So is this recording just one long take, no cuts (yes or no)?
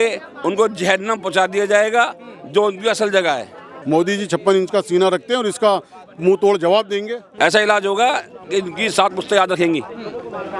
no